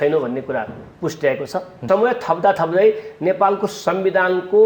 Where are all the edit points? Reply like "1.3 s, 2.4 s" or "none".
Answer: 1.8 s

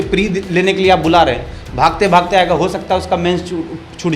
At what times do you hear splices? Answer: none

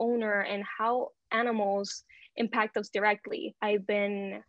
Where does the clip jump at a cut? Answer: 3.5 s

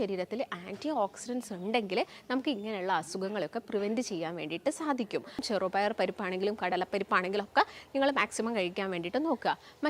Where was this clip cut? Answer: 5.5 s

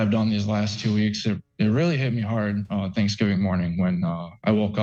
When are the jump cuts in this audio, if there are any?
none

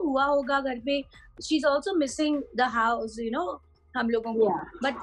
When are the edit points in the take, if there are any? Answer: none

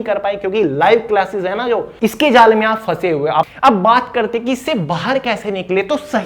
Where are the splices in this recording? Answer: 1.9 s, 3.5 s

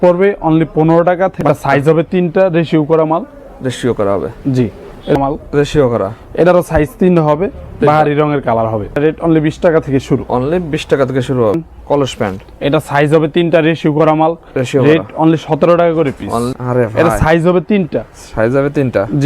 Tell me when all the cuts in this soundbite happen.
1.3 s, 5.2 s, 9.0 s, 11.5 s, 16.5 s

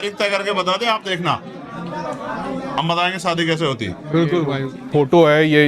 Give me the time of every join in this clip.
4.7 s

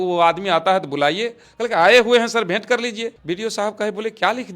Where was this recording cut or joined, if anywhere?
3.1 s

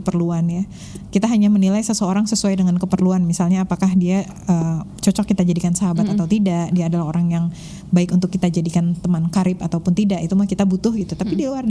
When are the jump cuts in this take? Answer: none

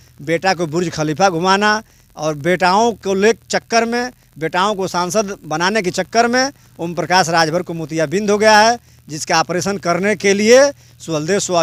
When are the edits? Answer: none

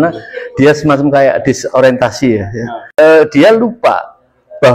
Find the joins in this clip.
2.8 s

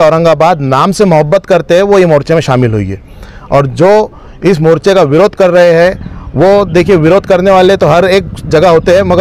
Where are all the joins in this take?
none

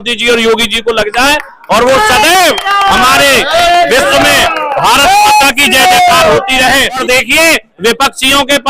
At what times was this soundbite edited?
7.0 s

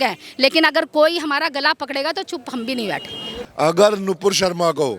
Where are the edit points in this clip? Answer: 3.4 s

